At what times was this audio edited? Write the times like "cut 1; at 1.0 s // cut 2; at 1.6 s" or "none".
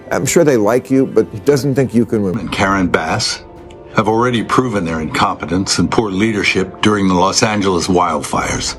cut 1; at 2.4 s